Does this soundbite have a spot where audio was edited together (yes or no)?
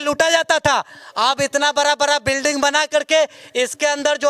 no